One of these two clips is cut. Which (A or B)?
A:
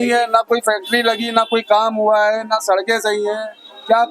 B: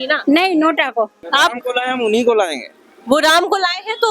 B